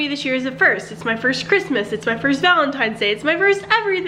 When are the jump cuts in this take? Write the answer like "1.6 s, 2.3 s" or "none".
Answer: none